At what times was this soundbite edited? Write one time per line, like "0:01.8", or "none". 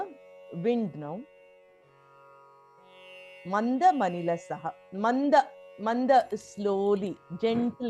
0:01.5
0:03.1